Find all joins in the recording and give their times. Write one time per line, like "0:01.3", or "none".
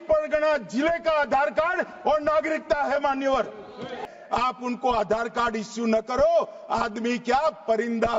0:04.0